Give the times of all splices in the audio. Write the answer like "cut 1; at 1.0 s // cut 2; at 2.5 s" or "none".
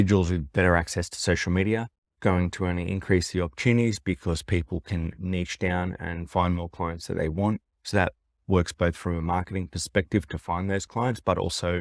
cut 1; at 2.1 s